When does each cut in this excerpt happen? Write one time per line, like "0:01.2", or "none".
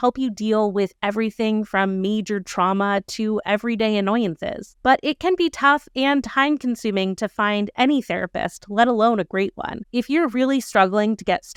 none